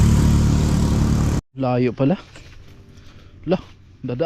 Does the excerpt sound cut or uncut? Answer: cut